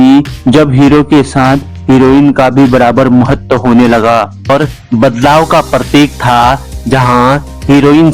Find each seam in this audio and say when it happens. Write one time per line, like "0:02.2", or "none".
0:04.5